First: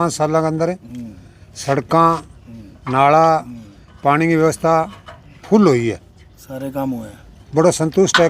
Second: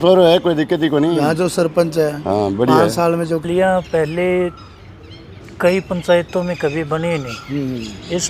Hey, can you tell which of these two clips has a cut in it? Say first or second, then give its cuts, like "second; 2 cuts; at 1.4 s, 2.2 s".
second; 1 cut; at 3.5 s